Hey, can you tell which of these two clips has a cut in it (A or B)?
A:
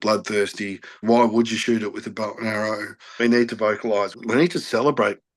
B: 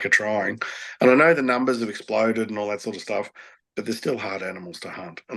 A